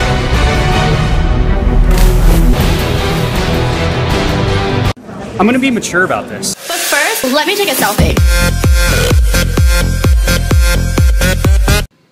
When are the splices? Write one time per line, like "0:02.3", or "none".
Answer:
0:11.1